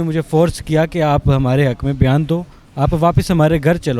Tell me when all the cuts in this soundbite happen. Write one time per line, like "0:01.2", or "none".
none